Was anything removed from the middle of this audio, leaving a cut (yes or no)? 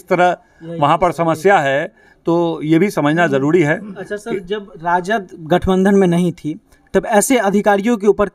no